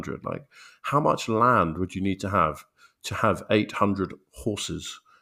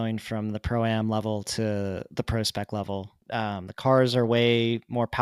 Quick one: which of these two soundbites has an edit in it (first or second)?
second